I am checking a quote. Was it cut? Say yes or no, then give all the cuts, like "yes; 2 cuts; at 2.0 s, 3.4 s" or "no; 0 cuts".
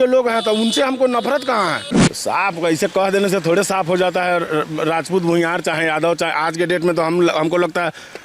yes; 1 cut; at 1.9 s